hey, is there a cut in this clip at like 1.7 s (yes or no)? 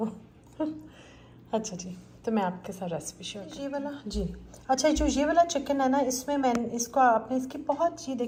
no